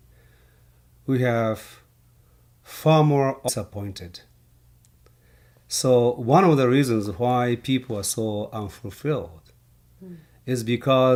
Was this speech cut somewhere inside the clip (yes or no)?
no